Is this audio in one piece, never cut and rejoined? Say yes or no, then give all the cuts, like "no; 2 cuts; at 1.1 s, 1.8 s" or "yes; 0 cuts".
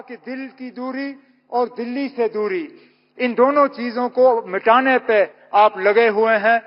yes; 0 cuts